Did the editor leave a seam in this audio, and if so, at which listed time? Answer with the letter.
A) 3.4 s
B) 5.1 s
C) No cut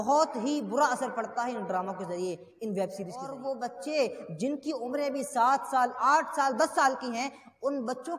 A